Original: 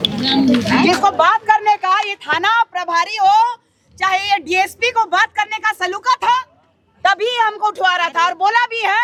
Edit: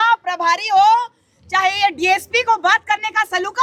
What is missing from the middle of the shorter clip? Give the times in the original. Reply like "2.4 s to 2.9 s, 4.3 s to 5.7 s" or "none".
none